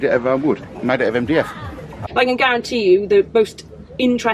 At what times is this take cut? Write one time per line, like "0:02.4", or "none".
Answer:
0:02.0